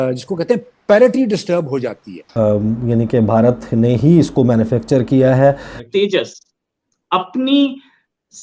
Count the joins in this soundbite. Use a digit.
2